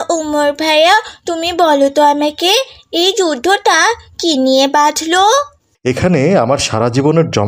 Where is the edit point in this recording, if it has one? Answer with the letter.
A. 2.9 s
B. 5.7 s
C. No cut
B